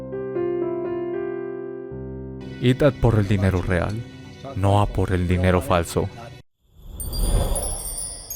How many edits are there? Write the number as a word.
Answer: two